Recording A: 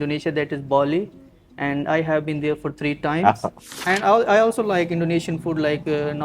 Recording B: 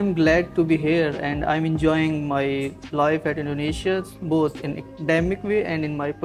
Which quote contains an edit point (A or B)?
A